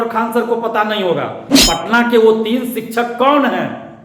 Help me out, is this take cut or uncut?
cut